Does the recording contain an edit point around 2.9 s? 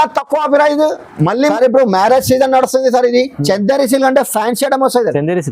no; 1 cut; at 1.3 s

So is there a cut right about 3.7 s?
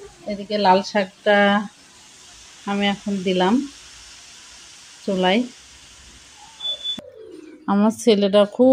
no; 1 cut; at 7.0 s

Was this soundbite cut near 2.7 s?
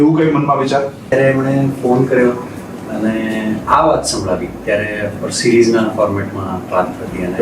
no; 1 cut; at 1.1 s

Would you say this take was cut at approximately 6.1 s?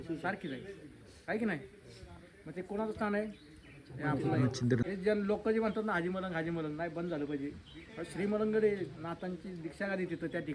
no; 1 cut; at 4.8 s

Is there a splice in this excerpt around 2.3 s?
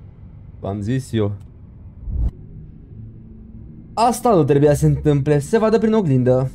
yes; 1 cut; at 2.3 s

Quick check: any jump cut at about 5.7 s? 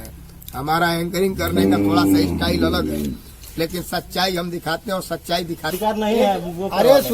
yes; 1 cut; at 5.7 s

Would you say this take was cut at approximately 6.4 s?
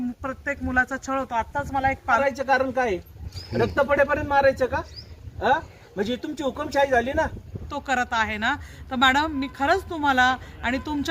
no; 2 cuts; at 2.2 s, 7.7 s

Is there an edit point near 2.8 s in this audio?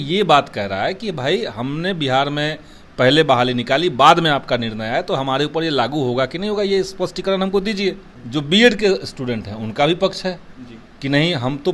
no; 1 cut; at 8.1 s

